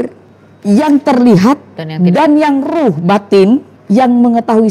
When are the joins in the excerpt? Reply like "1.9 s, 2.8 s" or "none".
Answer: 3.7 s